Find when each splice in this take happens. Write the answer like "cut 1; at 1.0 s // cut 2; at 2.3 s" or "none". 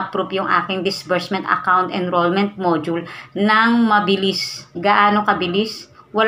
cut 1; at 4.7 s